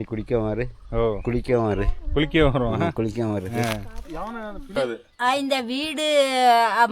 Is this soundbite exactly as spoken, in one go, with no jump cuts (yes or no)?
no